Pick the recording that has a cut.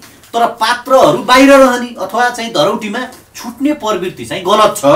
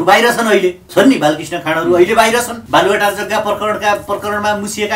second; 2 cuts; at 0.8 s, 2.6 s

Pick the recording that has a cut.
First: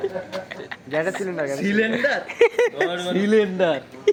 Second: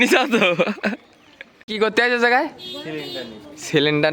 second; 1 cut; at 1.7 s

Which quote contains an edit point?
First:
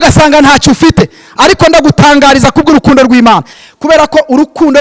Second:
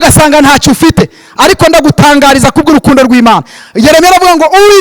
first; 1 cut; at 3.6 s

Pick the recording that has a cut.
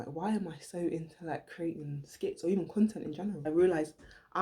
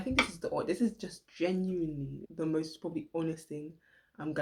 first; 1 cut; at 3.4 s

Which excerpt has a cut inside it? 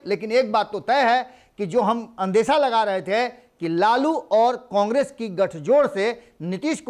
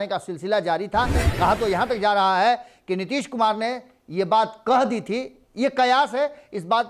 second; 1 cut; at 1.2 s

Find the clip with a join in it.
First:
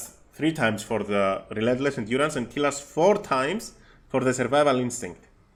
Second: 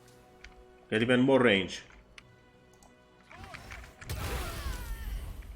second; 1 cut; at 2.2 s

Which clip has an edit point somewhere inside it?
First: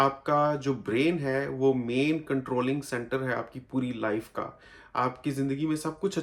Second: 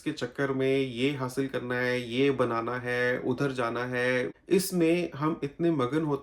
second; 1 cut; at 4.4 s

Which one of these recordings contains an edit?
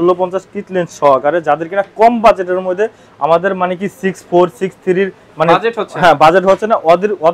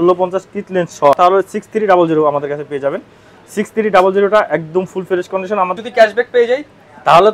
second; 2 cuts; at 1.1 s, 5.8 s

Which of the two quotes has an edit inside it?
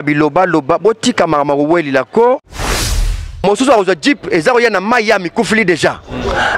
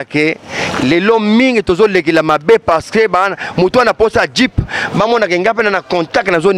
first; 1 cut; at 2.8 s

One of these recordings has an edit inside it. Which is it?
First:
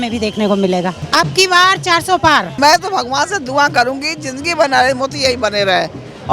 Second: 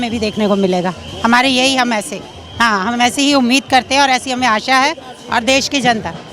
first; 2 cuts; at 1.0 s, 2.6 s

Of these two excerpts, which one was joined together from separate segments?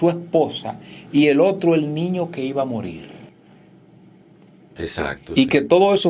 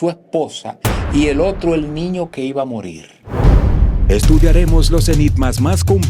second; 1 cut; at 3.3 s

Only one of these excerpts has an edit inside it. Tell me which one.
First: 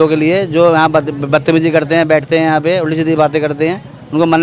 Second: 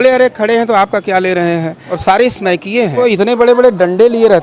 second; 2 cuts; at 1.8 s, 3.0 s

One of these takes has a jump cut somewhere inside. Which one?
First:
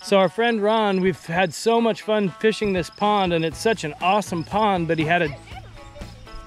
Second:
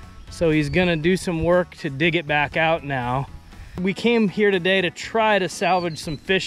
second; 1 cut; at 3.8 s

